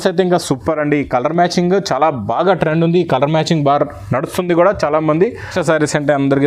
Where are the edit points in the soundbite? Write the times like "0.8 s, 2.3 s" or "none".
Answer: 5.5 s

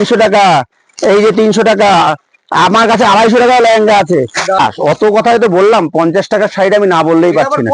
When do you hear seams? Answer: 4.6 s

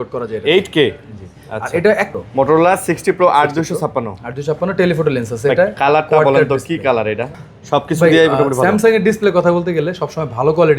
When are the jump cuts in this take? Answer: 2.1 s, 7.3 s

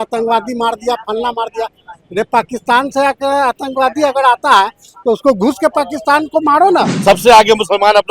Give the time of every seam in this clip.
6.9 s

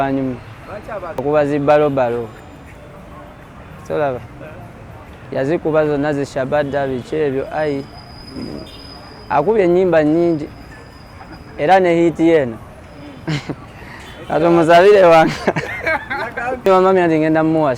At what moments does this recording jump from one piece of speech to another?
1.2 s, 16.7 s

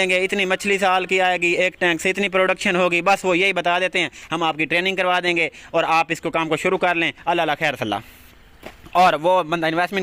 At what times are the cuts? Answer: none

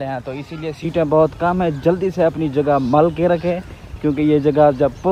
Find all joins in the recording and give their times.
none

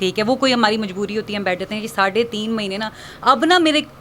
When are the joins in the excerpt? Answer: none

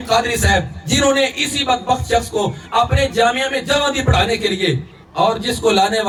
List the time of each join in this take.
none

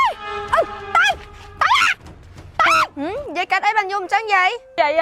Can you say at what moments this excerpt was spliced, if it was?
2.9 s

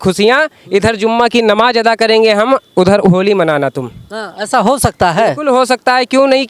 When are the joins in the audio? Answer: none

